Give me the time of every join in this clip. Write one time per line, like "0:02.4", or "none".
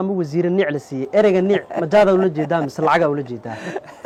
none